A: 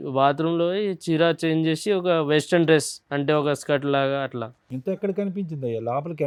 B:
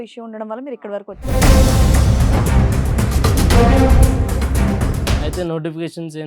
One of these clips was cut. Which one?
B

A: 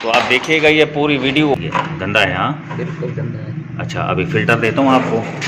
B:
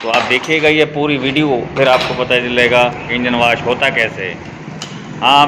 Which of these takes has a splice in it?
A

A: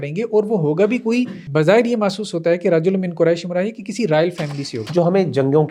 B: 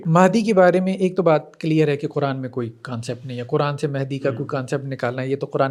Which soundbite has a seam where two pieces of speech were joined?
A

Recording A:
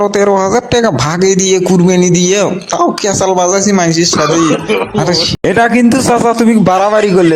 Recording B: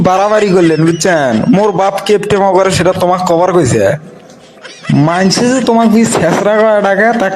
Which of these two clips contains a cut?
A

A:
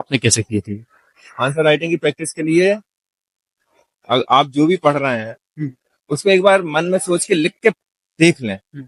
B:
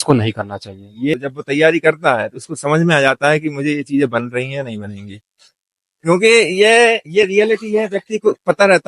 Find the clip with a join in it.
B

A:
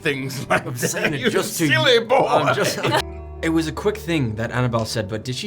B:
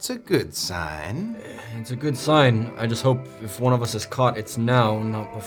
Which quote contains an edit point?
A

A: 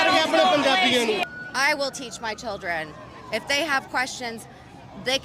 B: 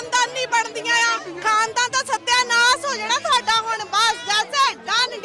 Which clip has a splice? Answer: A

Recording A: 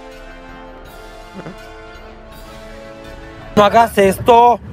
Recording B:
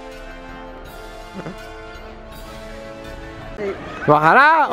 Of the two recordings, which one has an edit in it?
A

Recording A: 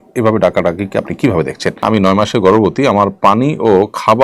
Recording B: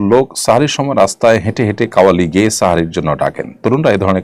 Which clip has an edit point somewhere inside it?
A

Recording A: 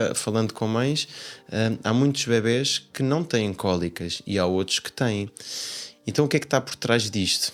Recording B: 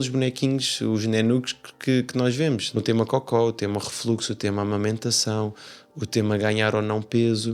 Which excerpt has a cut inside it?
B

